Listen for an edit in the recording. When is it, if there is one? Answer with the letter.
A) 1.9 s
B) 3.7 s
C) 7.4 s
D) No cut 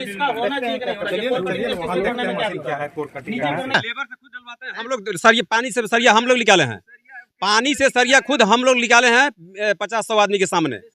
B